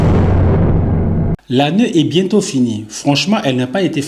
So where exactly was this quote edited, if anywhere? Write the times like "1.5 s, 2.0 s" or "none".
none